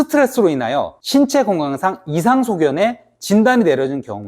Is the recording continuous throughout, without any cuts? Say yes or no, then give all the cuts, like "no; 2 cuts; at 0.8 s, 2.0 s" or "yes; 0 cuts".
yes; 0 cuts